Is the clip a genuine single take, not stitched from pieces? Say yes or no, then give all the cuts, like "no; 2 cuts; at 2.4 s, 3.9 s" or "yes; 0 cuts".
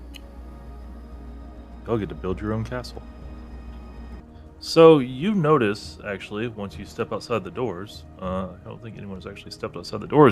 no; 1 cut; at 4.2 s